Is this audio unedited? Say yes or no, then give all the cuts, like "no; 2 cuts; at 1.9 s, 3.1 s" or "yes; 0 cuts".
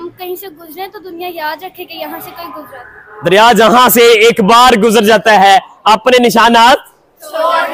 yes; 0 cuts